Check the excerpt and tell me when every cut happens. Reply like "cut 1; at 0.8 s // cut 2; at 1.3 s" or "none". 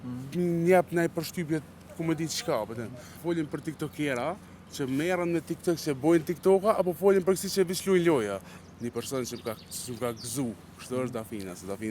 cut 1; at 3.1 s // cut 2; at 8.5 s